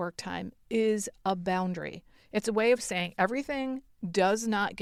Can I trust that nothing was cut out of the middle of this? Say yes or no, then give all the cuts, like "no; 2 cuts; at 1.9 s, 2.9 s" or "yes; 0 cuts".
yes; 0 cuts